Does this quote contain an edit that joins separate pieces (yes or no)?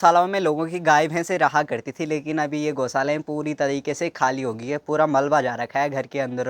no